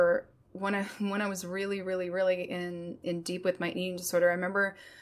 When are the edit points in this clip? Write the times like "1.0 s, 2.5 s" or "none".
3.0 s